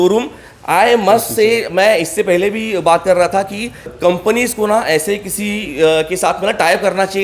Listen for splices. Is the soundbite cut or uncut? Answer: cut